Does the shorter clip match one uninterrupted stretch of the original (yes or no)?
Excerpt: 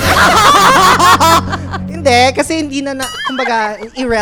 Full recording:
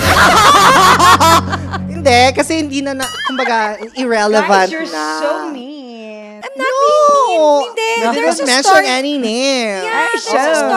yes